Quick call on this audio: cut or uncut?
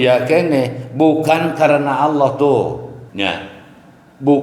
cut